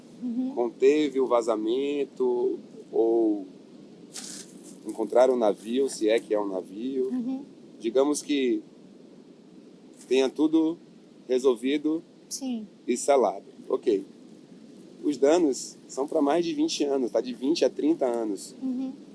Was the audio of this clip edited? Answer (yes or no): no